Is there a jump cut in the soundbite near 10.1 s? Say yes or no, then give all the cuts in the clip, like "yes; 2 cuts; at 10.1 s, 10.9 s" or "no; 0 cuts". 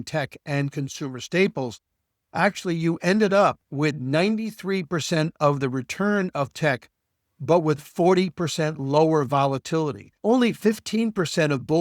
yes; 1 cut; at 10.1 s